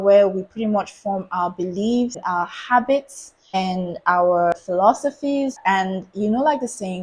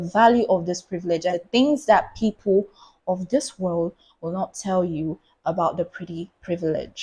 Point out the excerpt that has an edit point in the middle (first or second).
first